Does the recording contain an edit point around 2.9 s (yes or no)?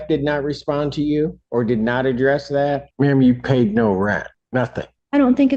yes